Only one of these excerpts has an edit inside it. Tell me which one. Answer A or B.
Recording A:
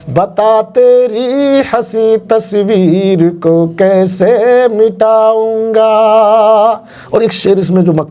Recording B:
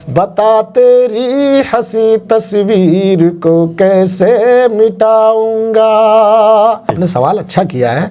B